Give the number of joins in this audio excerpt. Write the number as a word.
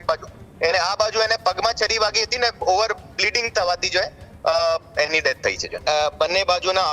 one